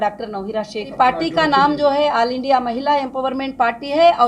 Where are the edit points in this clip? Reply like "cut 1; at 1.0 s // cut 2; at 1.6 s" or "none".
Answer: cut 1; at 0.9 s